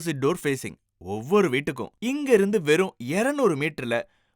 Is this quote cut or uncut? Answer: cut